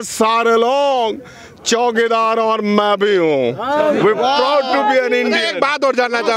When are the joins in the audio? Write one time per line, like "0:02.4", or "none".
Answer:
none

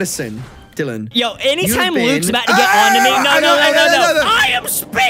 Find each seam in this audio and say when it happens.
0:01.0

